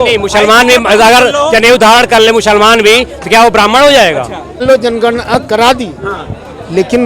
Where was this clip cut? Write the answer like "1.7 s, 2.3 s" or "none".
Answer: 4.6 s